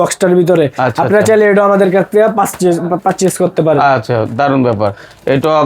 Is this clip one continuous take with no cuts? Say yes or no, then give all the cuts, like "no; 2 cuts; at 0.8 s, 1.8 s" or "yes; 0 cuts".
yes; 0 cuts